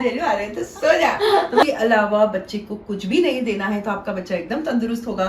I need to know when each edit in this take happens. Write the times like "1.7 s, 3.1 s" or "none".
1.4 s